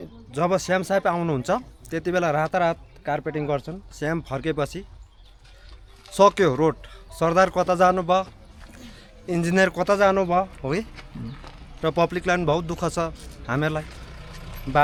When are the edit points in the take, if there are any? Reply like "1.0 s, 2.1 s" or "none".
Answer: none